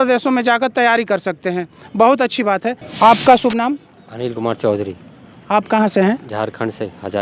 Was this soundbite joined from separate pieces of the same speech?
yes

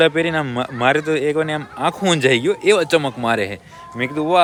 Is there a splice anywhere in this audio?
no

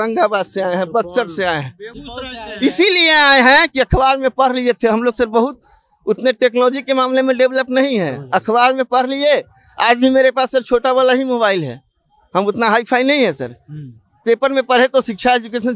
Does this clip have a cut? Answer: no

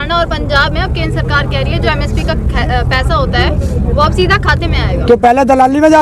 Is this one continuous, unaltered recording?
yes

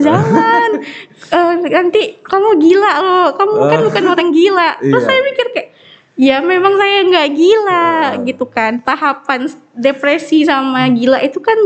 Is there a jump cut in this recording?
no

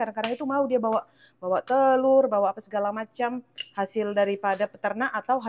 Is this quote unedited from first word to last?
yes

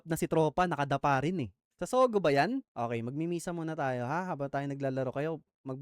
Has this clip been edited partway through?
yes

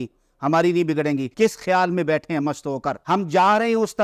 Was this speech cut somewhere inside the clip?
no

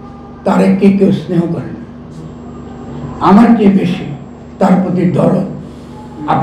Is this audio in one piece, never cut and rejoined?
yes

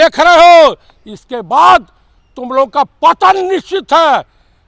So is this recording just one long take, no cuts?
yes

